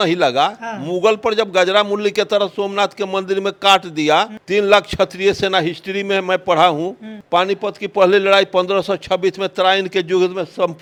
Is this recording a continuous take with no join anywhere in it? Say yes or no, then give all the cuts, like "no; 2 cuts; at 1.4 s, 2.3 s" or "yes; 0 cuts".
yes; 0 cuts